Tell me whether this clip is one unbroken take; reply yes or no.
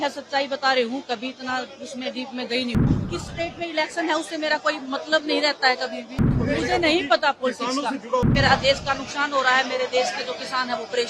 no